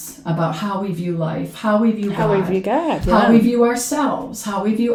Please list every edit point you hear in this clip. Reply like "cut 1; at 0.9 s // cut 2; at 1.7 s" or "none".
none